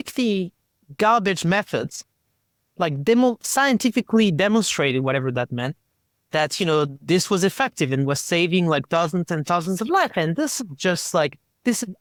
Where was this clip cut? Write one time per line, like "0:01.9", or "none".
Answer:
none